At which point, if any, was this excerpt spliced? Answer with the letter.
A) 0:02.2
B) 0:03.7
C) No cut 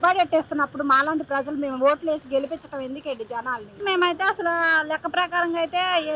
B